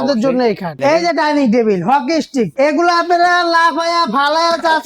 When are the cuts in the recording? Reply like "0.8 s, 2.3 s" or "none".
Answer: 0.8 s, 2.5 s

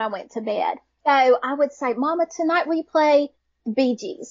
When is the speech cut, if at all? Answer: 0.9 s

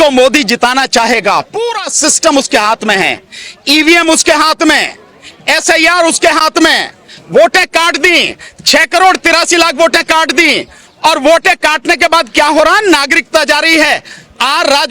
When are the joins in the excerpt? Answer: none

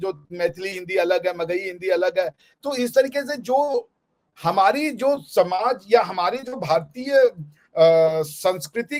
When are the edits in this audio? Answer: none

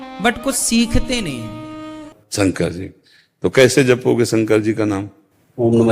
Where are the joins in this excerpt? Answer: 2.2 s

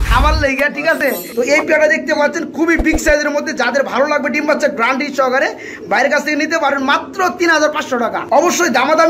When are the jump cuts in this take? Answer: 1.0 s, 8.2 s

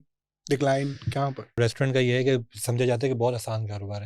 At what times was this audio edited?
1.6 s

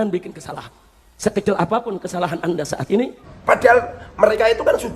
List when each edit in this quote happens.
3.3 s

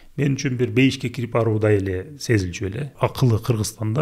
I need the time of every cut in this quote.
2.9 s

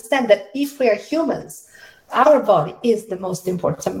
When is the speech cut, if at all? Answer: 2.0 s

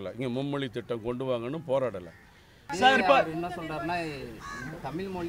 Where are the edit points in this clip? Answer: 2.7 s

